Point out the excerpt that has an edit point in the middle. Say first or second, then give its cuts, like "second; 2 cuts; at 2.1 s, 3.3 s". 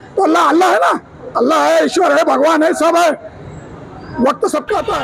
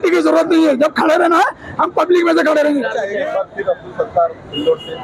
second; 1 cut; at 3.2 s